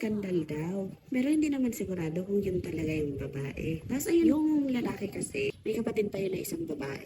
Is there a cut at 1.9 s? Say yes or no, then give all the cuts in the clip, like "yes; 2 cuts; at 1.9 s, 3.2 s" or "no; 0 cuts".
no; 2 cuts; at 4.3 s, 5.6 s